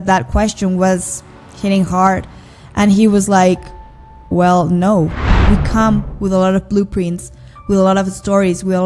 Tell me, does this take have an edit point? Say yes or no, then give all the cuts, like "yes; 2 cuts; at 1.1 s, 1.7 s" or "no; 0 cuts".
yes; 1 cut; at 5.3 s